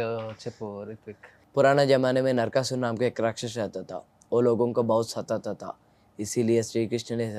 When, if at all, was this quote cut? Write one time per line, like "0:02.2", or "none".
none